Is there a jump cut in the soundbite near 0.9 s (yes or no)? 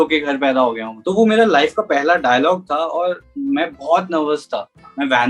yes